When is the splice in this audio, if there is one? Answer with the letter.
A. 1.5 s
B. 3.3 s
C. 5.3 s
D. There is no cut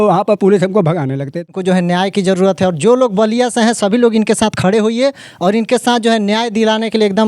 A